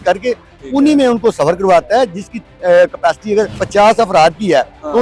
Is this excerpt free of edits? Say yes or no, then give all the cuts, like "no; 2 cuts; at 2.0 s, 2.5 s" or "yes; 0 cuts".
no; 1 cut; at 3.6 s